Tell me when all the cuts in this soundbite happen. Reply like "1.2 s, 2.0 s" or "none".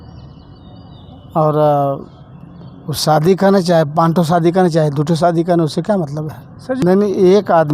6.8 s